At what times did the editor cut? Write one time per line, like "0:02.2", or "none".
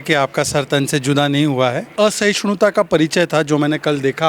0:01.8